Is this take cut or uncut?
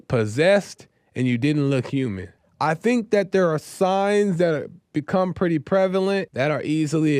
cut